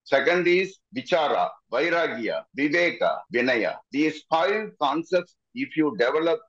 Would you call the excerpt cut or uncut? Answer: uncut